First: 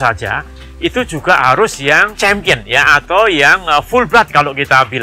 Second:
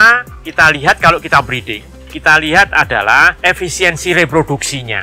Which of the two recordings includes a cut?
second; 1 cut; at 3.3 s

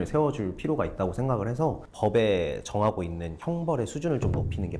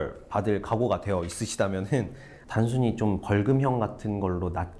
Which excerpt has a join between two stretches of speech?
second; 1 cut; at 2.4 s

